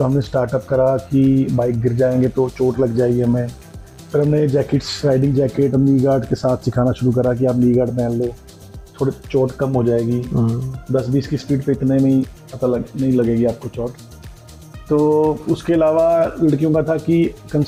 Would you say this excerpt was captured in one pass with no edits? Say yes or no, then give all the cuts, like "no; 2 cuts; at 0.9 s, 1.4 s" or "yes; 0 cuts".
yes; 0 cuts